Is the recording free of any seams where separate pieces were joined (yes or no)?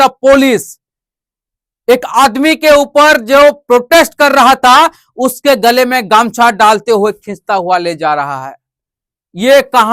yes